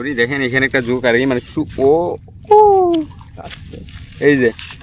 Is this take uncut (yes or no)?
yes